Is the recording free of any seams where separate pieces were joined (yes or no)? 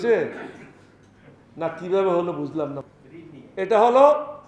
no